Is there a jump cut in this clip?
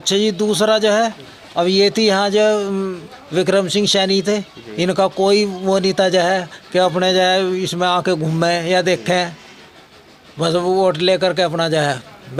no; 0 cuts

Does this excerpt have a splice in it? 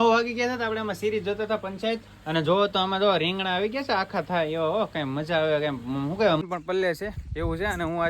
yes; 1 cut; at 6.4 s

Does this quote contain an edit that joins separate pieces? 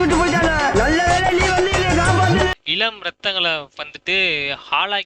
yes; 1 cut; at 2.5 s

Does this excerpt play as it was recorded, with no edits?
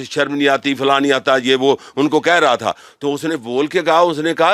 yes; 0 cuts

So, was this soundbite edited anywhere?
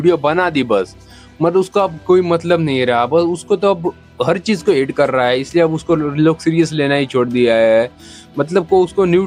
no; 0 cuts

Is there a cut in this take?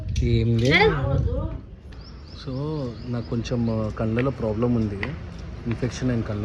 no; 0 cuts

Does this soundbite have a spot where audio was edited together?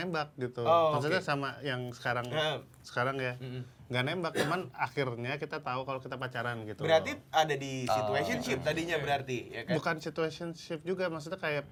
no; 0 cuts

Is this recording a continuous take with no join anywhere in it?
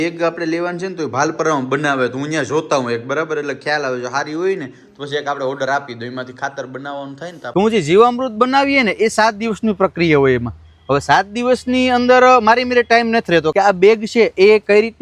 no; 2 cuts; at 7.5 s, 13.5 s

